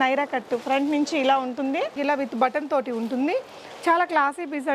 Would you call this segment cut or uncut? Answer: cut